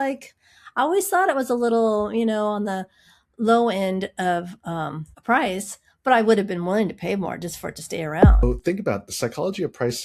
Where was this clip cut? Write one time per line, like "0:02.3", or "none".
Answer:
0:08.4